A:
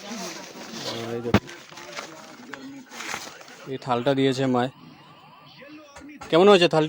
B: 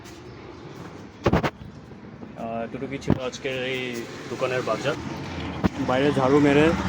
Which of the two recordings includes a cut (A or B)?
B